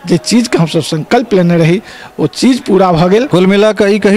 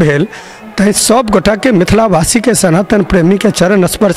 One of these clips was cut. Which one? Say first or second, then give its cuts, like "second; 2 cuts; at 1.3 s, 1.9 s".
first; 1 cut; at 3.3 s